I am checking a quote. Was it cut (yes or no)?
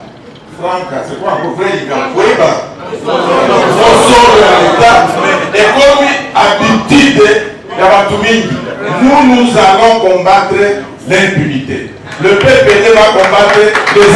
no